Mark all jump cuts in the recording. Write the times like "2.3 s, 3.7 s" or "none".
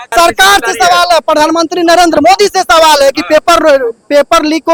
none